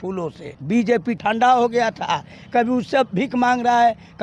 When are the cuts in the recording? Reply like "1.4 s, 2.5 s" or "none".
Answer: 0.9 s